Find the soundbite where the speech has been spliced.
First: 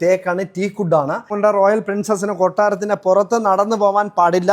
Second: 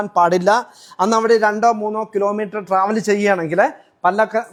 first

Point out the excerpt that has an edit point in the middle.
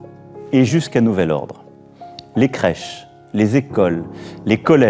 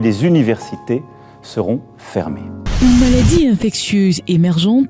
second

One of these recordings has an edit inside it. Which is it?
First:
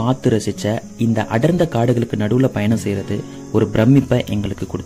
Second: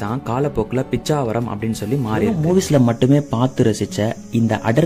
second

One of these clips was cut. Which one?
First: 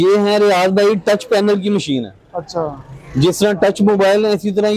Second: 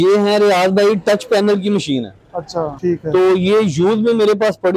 second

